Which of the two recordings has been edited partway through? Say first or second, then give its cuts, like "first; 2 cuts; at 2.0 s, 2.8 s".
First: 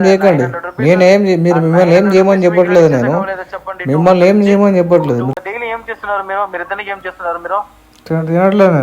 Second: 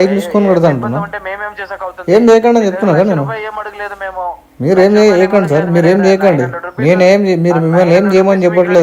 first; 1 cut; at 5.3 s